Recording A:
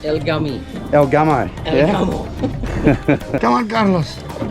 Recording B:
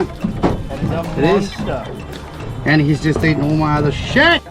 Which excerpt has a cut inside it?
A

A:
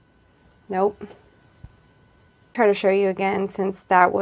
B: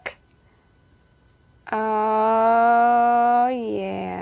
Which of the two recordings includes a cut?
A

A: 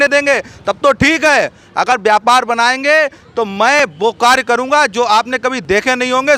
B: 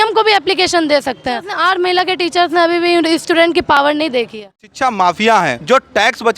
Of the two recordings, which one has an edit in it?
B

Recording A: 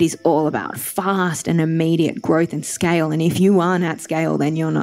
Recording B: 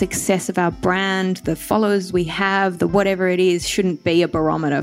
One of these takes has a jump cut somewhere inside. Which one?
A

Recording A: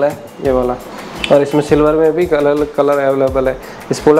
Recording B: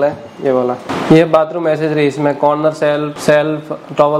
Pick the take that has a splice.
B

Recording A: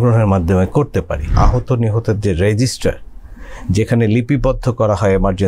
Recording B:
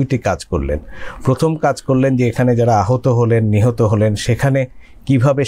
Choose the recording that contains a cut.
A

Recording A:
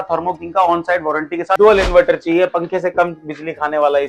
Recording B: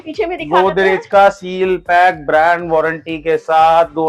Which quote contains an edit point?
A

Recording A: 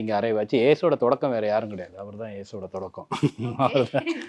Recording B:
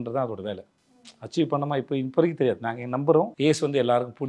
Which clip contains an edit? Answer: B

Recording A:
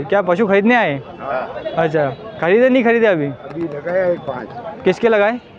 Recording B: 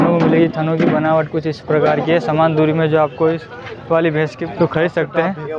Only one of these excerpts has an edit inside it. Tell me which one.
B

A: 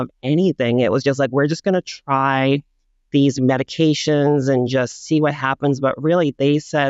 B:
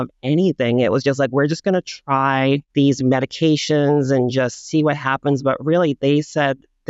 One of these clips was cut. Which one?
B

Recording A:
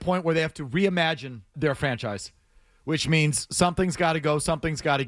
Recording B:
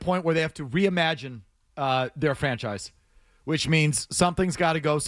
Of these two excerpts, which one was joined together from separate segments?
A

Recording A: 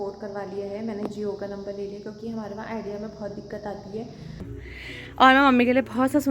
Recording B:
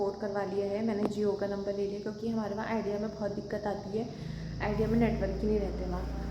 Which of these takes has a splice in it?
A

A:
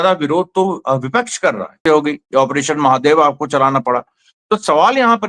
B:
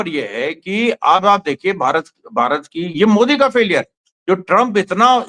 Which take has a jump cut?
A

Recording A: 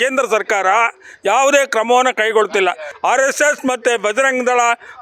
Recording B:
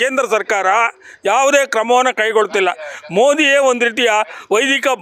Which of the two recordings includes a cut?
A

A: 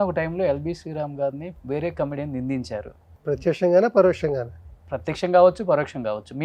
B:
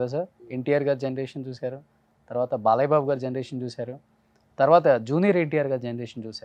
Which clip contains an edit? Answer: A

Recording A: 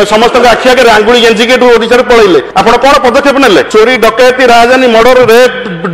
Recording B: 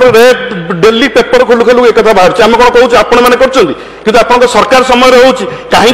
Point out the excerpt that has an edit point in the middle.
A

